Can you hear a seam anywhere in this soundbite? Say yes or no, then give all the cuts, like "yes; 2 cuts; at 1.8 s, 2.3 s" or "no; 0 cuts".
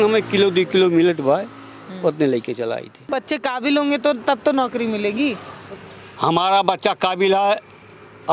yes; 1 cut; at 3.1 s